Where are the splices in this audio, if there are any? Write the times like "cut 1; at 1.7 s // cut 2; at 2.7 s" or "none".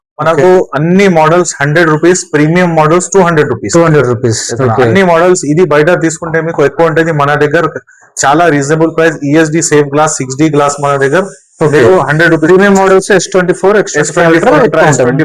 none